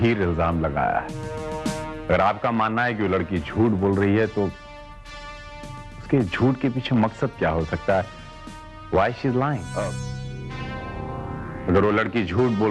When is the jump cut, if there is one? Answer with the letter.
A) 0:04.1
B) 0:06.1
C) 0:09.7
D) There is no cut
C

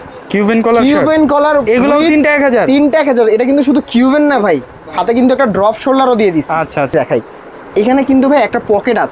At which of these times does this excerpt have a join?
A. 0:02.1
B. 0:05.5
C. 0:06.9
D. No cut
C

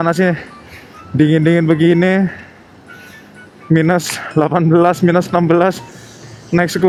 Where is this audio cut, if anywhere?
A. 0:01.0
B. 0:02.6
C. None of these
C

